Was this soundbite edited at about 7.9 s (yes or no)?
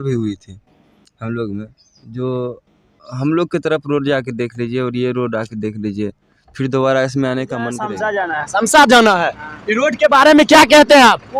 yes